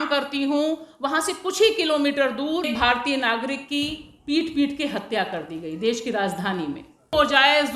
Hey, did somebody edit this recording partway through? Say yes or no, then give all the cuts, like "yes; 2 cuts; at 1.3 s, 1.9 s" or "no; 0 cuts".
yes; 1 cut; at 2.7 s